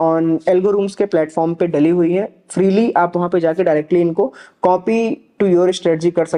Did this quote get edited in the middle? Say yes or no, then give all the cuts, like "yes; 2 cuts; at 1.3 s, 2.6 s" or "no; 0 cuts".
no; 0 cuts